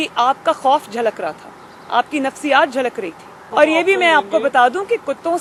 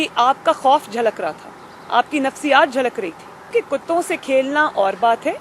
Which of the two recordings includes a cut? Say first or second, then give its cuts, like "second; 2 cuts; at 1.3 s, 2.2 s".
second; 1 cut; at 3.4 s